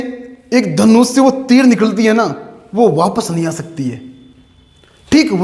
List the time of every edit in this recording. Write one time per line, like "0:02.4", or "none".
none